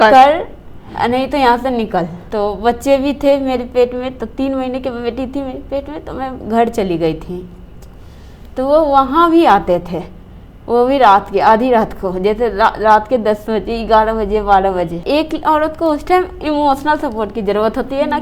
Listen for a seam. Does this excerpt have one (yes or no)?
yes